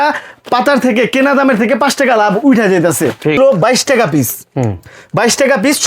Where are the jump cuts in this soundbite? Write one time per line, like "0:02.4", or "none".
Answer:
0:03.4